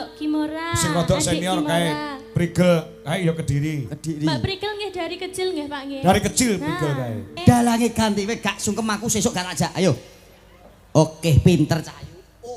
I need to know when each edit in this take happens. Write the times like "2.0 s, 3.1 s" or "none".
7.4 s